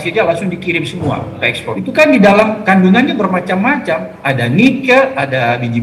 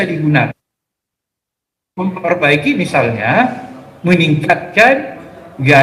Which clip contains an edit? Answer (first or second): first